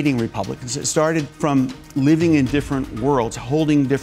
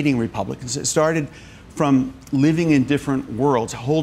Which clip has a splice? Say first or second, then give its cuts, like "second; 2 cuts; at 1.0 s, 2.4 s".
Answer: first; 1 cut; at 1.3 s